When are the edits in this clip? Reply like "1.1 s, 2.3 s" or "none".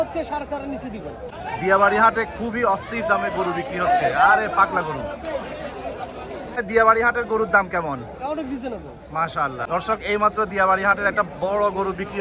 1.3 s, 6.6 s, 9.7 s